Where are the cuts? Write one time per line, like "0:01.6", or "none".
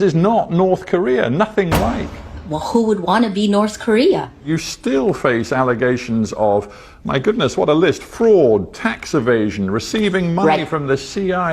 0:04.4